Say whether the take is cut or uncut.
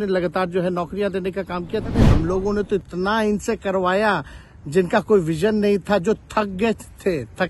cut